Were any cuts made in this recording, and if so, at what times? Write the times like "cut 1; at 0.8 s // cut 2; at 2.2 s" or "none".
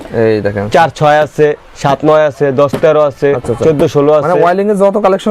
none